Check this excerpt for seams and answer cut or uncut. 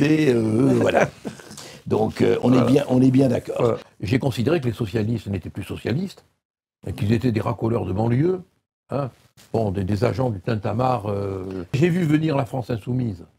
cut